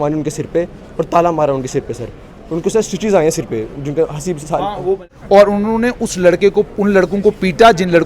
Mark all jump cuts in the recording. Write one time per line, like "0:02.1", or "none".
0:05.1